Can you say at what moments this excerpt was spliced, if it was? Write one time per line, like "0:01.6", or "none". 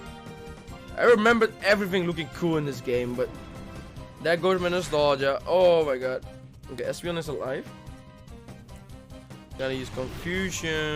0:09.6